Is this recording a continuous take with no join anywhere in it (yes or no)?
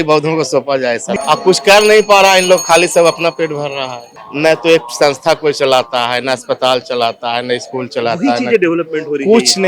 no